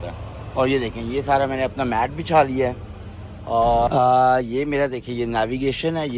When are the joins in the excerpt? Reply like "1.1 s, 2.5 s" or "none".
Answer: 3.9 s